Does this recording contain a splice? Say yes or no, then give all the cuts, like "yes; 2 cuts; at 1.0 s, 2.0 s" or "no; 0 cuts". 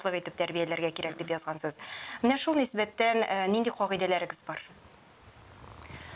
no; 0 cuts